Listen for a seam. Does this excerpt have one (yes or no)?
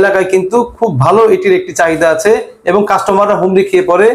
no